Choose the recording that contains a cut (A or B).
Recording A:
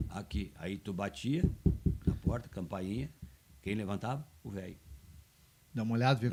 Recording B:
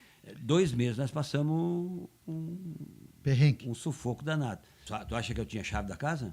B